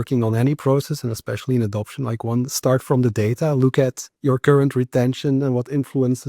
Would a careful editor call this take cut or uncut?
cut